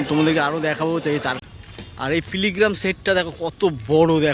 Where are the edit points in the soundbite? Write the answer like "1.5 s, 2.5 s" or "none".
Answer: 1.4 s